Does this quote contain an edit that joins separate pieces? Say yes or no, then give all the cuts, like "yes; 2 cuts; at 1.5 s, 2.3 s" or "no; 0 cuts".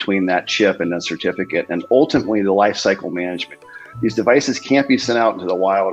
no; 0 cuts